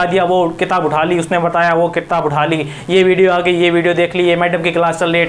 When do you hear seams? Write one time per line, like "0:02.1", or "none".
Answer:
none